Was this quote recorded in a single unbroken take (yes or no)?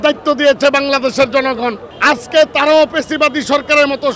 yes